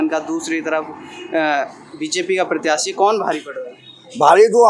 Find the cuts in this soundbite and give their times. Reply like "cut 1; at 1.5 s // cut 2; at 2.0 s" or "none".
none